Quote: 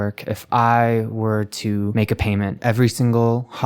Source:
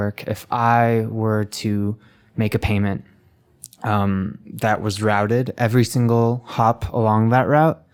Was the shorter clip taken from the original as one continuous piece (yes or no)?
no